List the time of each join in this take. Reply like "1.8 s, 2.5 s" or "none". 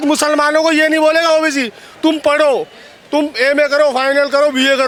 none